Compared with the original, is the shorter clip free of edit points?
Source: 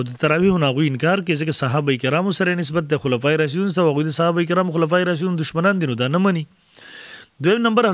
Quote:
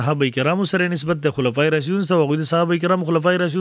yes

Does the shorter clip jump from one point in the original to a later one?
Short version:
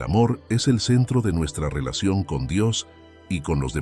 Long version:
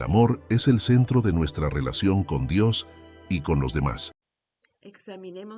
no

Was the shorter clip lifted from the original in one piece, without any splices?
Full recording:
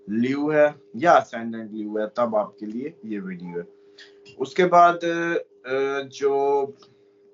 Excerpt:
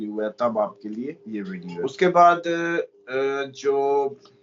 no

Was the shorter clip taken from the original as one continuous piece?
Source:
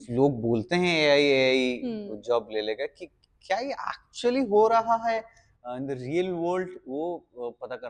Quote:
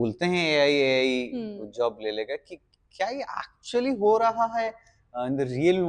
yes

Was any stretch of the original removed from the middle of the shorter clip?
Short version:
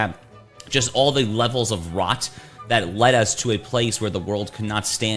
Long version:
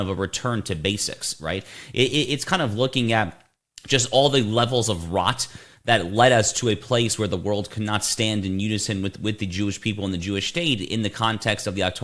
no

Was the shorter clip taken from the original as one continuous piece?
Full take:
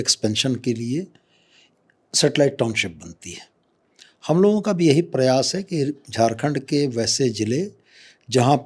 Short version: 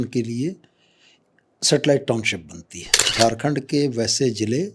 no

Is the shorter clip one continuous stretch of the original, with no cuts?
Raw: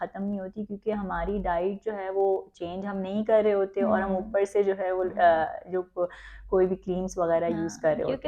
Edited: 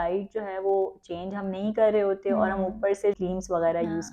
no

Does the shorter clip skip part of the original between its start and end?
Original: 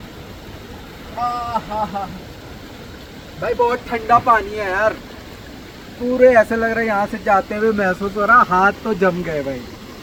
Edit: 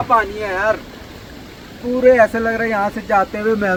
no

